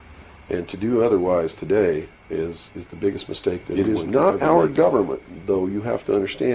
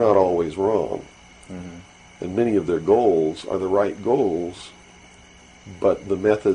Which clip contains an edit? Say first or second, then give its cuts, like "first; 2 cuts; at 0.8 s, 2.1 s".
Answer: first; 1 cut; at 3.7 s